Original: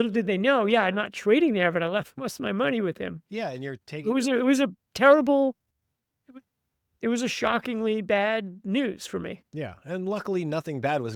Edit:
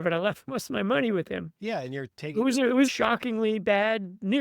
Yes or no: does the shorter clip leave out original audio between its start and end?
yes